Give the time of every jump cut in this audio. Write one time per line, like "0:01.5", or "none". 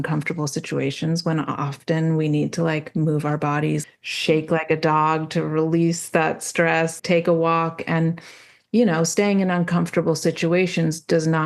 0:03.8
0:07.0

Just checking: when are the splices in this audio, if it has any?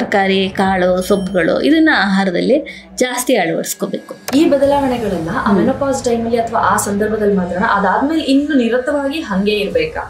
0:04.1

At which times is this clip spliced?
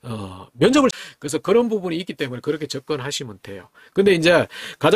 0:00.9

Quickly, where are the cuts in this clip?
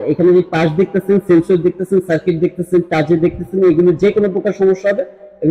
none

